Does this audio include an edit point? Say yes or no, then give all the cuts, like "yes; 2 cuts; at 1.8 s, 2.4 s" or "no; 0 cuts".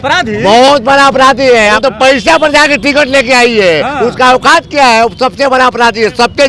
yes; 1 cut; at 1.8 s